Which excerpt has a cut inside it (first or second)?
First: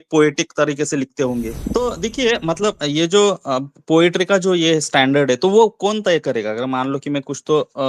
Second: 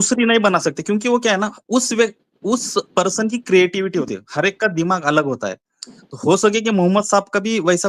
first